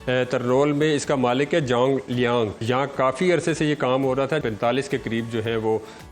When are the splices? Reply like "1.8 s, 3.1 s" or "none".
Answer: 2.6 s, 4.4 s